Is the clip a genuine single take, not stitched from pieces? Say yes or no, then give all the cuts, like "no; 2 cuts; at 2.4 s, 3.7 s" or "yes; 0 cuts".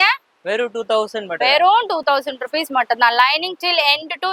yes; 0 cuts